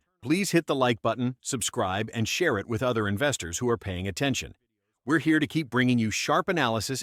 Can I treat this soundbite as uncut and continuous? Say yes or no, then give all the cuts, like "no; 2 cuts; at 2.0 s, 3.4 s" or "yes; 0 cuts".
yes; 0 cuts